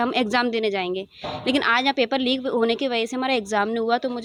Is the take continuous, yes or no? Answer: yes